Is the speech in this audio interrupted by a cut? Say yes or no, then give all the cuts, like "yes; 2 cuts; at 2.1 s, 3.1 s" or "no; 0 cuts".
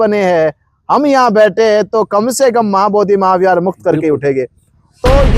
no; 0 cuts